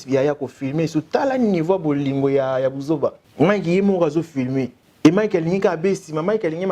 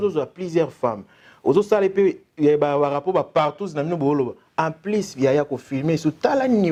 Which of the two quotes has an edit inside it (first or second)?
first